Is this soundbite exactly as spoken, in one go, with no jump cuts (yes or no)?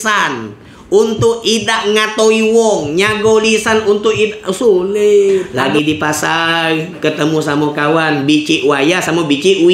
no